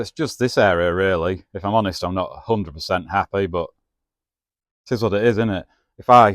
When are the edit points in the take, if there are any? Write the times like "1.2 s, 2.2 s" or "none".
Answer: none